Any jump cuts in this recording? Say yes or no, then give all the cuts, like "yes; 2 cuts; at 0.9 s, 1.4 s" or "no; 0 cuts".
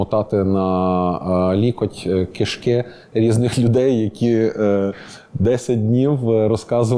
no; 0 cuts